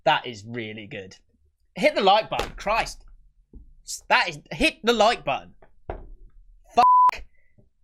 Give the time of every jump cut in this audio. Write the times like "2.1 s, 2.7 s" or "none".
none